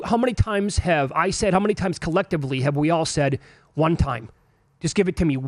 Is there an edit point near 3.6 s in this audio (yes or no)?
no